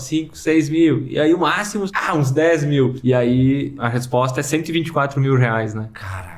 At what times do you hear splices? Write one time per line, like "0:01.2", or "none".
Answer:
0:01.9
0:03.0
0:03.8

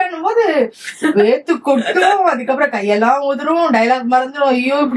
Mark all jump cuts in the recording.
none

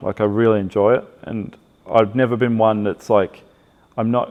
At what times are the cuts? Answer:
none

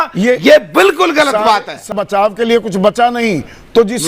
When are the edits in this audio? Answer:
0:01.9

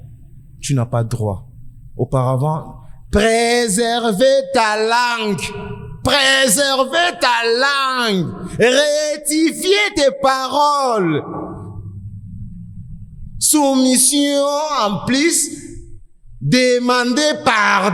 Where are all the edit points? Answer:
none

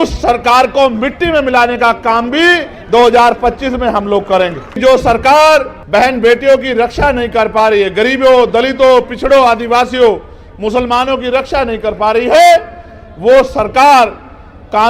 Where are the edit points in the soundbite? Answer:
0:04.7
0:05.8

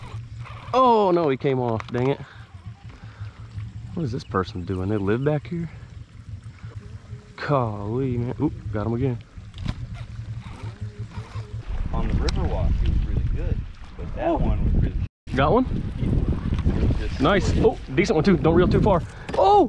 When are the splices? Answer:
0:06.7
0:11.6
0:16.6
0:18.8

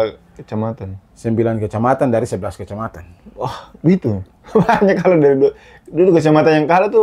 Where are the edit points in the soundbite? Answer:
0:04.3

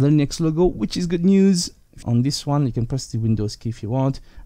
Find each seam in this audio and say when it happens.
0:02.0

